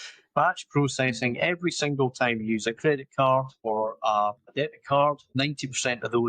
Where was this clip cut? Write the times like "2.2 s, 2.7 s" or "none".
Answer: 3.5 s, 4.5 s, 5.2 s